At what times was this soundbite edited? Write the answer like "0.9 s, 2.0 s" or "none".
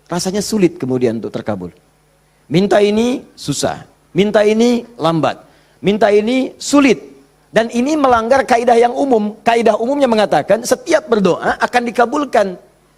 none